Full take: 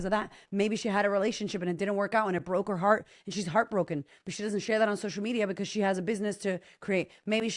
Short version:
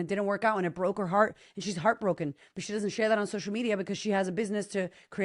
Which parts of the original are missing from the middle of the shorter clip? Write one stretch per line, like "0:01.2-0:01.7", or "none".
none